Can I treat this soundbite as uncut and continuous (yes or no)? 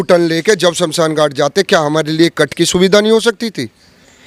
yes